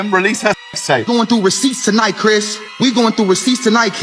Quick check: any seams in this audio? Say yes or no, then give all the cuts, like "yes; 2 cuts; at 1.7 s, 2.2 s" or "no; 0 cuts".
yes; 1 cut; at 1.0 s